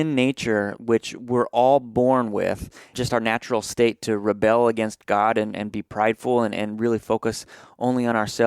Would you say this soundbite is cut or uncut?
cut